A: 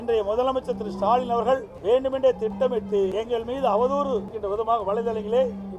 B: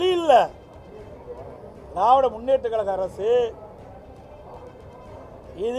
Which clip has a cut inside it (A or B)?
A